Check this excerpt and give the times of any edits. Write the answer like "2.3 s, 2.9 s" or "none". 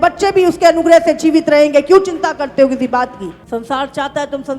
3.3 s